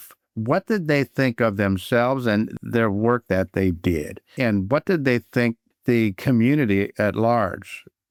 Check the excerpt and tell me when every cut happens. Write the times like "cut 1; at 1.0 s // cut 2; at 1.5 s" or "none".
none